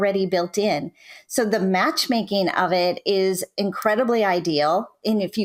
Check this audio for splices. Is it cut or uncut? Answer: uncut